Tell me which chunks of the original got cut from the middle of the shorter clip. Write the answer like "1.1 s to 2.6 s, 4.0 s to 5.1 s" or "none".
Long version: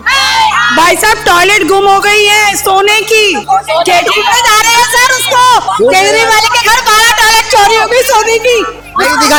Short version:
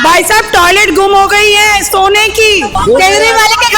3.4 s to 5.6 s